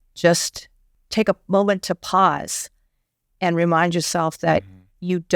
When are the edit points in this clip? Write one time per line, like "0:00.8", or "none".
0:00.9